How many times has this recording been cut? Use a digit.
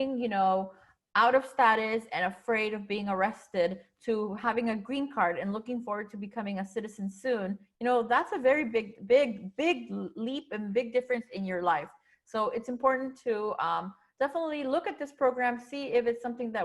0